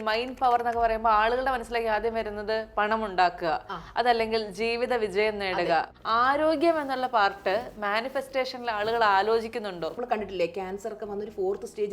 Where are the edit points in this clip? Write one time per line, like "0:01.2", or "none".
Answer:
0:06.0
0:09.9

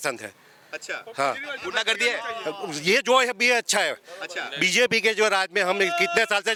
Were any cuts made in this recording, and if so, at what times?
none

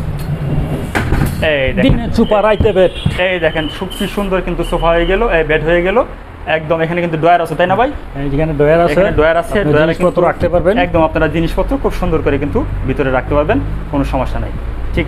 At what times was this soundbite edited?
none

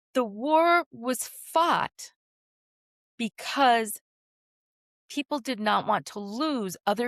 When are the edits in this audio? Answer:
none

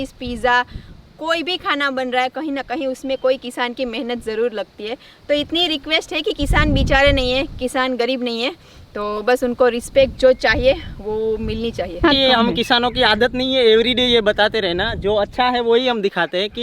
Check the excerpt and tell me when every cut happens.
0:12.0

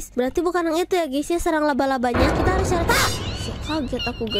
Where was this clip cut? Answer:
none

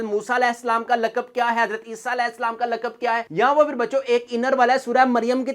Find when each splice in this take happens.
0:03.3

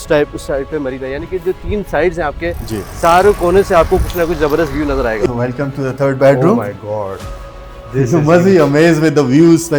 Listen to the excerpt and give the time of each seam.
0:05.3

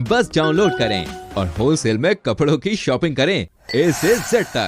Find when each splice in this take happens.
none

